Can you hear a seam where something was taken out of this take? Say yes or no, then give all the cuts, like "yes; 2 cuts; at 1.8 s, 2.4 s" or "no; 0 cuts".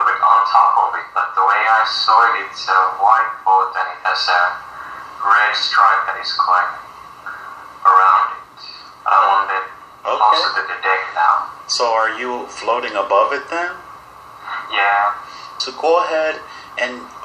yes; 1 cut; at 4.2 s